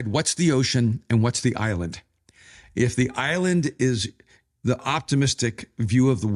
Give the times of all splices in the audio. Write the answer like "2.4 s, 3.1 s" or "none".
none